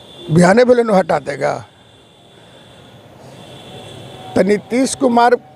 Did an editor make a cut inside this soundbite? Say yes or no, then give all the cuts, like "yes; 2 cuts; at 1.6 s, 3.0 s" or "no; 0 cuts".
no; 0 cuts